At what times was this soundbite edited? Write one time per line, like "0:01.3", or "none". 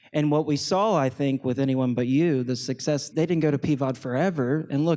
0:03.1